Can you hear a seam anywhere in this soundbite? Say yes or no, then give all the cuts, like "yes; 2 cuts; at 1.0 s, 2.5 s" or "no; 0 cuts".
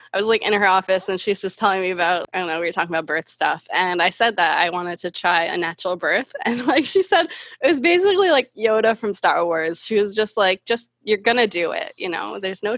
yes; 1 cut; at 2.2 s